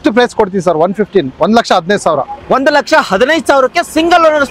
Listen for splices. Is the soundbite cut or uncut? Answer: uncut